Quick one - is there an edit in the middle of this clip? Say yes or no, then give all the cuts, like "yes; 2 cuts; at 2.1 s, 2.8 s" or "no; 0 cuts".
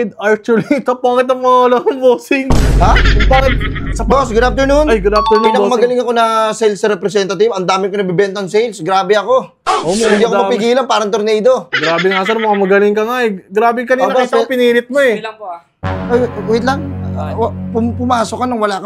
no; 0 cuts